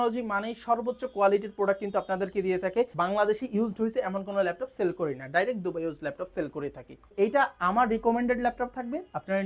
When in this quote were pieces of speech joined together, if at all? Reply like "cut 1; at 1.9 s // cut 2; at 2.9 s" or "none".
cut 1; at 2.9 s // cut 2; at 7.1 s

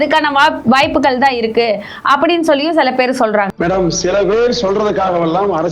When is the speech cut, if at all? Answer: cut 1; at 3.5 s

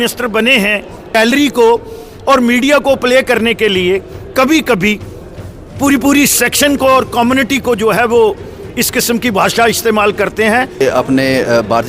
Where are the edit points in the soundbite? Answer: cut 1; at 1.2 s // cut 2; at 10.8 s

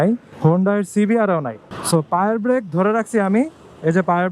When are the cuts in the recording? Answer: cut 1; at 1.6 s

